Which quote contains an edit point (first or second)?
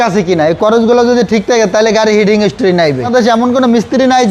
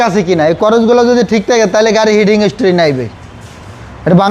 first